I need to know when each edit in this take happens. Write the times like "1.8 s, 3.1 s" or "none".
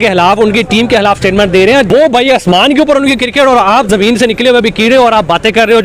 1.9 s